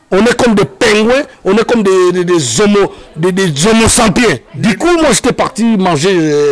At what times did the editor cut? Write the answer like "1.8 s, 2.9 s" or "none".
4.5 s